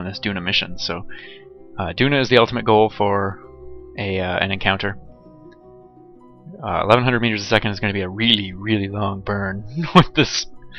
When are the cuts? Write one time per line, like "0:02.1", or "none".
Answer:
none